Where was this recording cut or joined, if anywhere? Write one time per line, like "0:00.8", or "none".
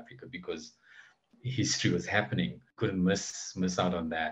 0:02.7